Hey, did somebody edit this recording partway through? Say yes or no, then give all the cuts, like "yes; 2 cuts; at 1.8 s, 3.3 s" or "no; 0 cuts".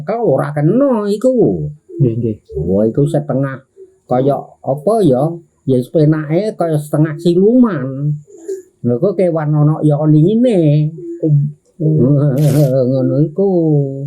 no; 0 cuts